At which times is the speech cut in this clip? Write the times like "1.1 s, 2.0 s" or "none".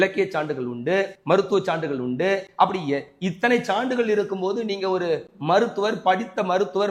none